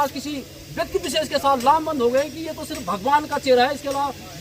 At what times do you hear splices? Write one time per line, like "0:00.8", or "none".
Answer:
none

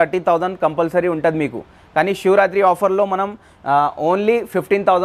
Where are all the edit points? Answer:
none

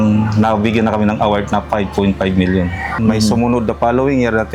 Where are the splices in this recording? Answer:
0:03.0

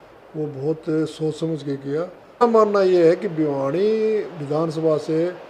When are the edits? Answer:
0:02.4

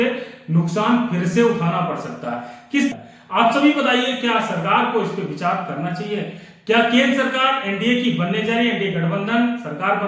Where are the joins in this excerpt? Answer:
0:02.9

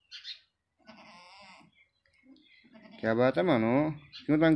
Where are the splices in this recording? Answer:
none

